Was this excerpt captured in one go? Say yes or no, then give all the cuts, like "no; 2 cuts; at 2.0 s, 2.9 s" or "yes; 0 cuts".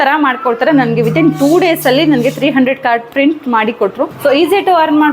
no; 1 cut; at 4.1 s